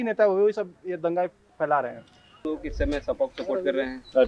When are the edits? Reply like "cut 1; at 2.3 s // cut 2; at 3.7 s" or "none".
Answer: cut 1; at 2.5 s